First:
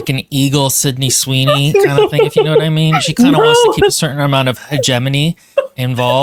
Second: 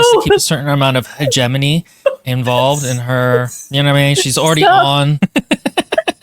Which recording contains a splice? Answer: second; 1 cut; at 5.2 s

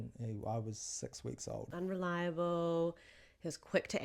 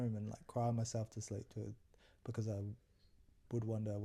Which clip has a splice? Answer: first; 1 cut; at 1.7 s

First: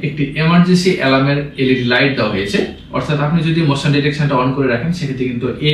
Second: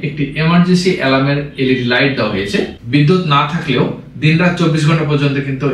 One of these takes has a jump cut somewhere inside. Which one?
second; 1 cut; at 2.8 s

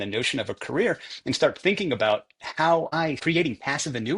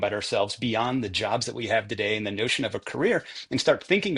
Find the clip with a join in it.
first; 1 cut; at 3.2 s

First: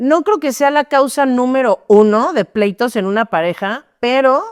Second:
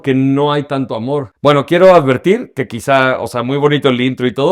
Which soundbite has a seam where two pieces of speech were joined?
second; 1 cut; at 1.3 s

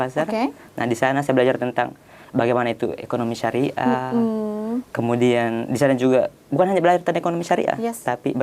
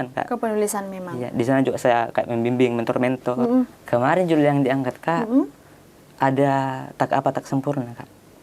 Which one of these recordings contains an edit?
second; 1 cut; at 3.8 s

